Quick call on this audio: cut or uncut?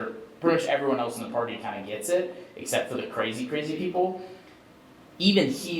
uncut